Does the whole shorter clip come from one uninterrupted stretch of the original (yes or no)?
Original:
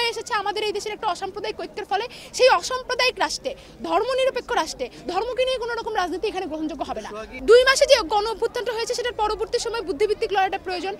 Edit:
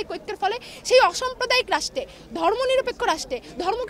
yes